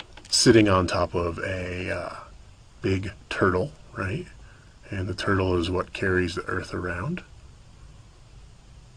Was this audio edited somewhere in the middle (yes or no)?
no